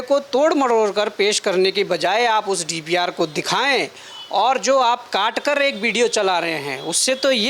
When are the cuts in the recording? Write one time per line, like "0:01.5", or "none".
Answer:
none